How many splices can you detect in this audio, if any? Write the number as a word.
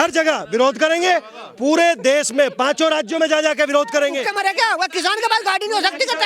one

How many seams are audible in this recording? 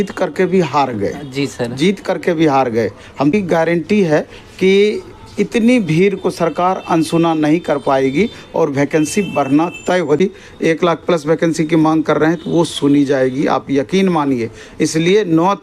two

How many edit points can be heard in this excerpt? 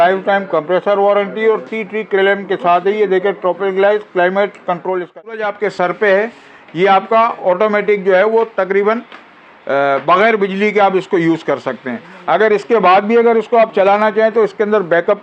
one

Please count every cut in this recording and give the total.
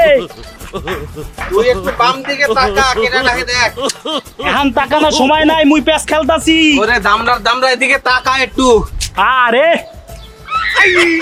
zero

